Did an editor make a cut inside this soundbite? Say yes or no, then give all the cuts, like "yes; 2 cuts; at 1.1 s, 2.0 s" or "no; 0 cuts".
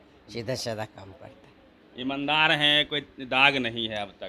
no; 0 cuts